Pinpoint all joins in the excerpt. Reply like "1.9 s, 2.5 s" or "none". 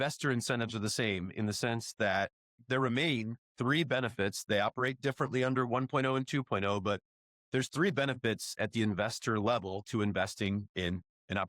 2.6 s